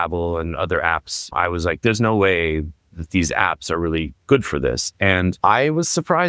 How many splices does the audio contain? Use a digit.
2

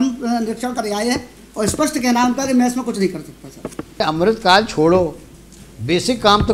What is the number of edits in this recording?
1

